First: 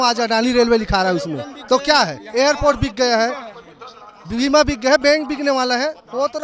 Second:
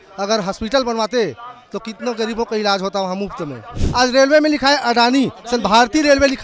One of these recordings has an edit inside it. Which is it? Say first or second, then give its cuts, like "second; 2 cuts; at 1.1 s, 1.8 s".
second; 1 cut; at 3.7 s